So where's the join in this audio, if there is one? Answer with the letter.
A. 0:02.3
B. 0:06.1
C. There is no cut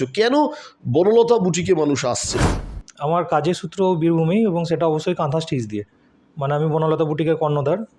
A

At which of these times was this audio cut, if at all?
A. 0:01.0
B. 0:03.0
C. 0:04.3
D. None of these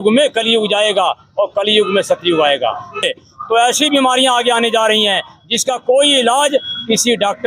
B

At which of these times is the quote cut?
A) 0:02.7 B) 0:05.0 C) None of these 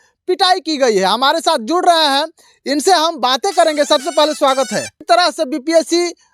B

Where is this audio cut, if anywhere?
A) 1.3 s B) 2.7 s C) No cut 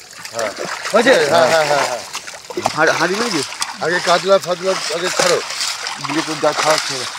B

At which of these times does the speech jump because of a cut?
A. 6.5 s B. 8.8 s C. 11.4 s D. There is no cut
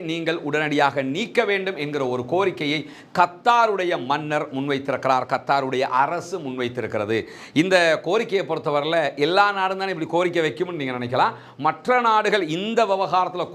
D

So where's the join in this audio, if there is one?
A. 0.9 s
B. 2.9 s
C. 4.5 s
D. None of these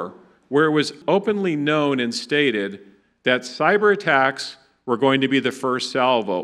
A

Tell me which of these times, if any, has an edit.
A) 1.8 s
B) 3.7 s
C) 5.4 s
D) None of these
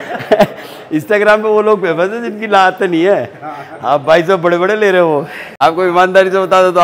C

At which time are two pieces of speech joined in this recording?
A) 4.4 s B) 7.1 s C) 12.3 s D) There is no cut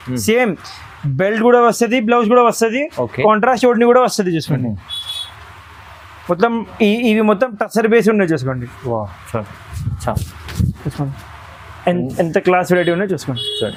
D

